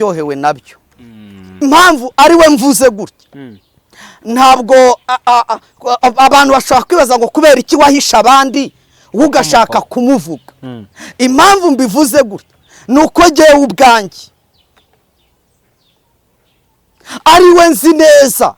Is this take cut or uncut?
cut